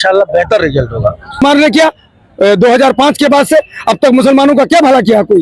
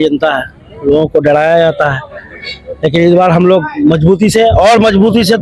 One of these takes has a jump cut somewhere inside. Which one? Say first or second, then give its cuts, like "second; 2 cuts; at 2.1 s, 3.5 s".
first; 1 cut; at 1.4 s